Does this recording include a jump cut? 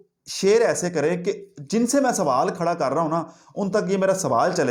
no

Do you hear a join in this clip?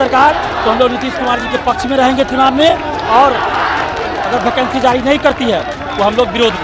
no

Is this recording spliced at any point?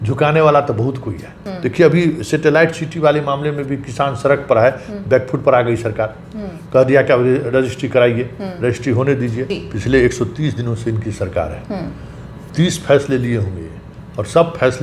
yes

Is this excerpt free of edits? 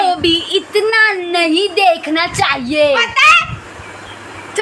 yes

